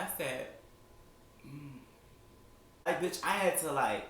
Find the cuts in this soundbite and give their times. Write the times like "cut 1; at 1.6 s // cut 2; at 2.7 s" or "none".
cut 1; at 2.9 s